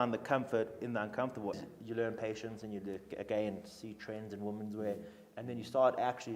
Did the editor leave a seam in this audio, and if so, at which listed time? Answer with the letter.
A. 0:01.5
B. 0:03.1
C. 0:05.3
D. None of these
A